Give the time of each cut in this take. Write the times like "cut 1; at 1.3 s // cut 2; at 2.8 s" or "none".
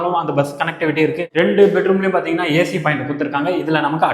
cut 1; at 1.2 s